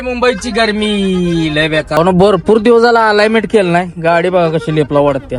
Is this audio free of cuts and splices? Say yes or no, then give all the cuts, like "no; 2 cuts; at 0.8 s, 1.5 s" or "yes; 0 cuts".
no; 1 cut; at 2.0 s